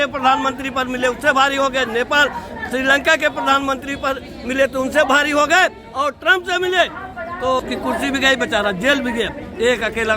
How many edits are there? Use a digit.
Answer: 1